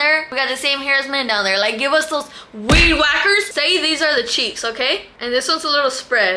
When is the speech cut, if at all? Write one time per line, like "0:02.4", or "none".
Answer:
0:03.5